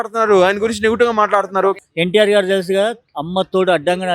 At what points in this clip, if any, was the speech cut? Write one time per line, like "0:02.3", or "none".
0:01.8